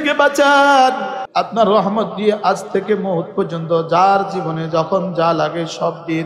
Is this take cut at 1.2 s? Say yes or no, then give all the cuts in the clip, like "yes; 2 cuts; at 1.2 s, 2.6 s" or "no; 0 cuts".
yes; 1 cut; at 1.2 s